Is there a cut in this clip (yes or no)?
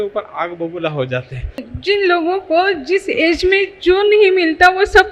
yes